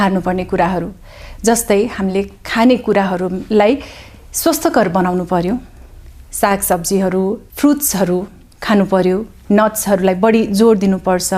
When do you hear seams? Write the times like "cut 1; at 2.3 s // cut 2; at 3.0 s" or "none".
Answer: cut 1; at 7.5 s

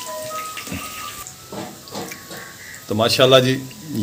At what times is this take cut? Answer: none

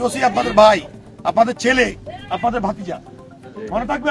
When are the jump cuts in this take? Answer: none

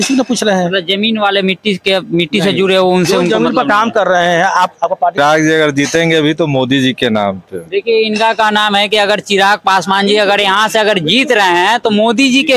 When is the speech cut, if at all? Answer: cut 1; at 5.2 s

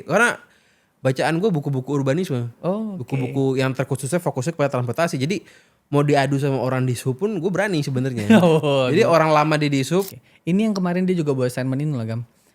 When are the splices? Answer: cut 1; at 10.2 s

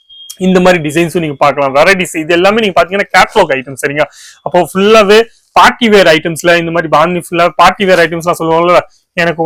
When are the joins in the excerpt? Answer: none

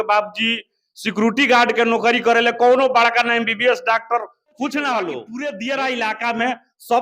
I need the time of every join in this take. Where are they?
cut 1; at 5.3 s

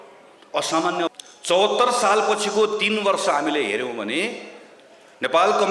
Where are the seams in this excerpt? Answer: cut 1; at 1.1 s

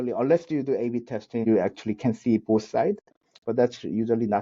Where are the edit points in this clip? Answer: cut 1; at 1.4 s

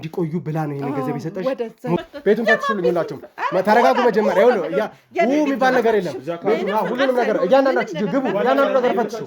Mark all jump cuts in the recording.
cut 1; at 2.1 s

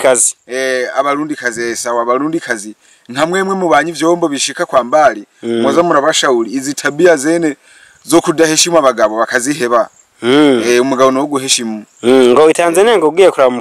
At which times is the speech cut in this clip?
none

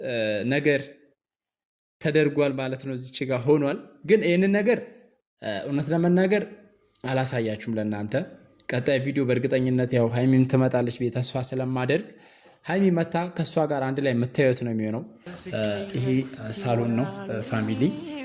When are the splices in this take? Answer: cut 1; at 15.3 s

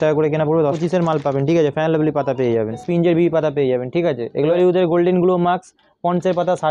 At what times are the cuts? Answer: cut 1; at 0.8 s // cut 2; at 2.8 s // cut 3; at 4.5 s

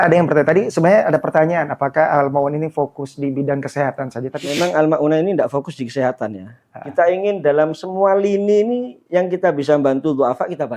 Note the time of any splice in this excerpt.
cut 1; at 4.4 s

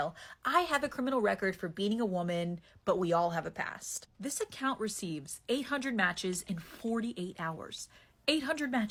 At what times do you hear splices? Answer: none

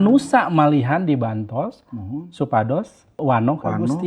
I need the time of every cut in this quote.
cut 1; at 3.2 s

